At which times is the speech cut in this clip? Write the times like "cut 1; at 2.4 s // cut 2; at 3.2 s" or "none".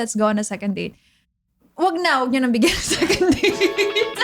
none